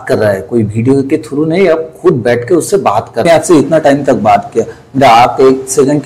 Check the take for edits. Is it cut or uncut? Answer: cut